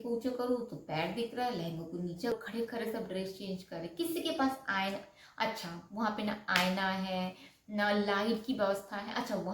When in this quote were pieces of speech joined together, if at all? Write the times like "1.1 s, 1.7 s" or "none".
2.3 s